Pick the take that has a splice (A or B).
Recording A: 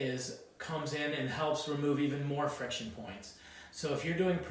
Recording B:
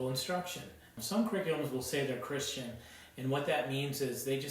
B